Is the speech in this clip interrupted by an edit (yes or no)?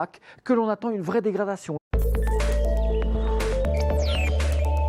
no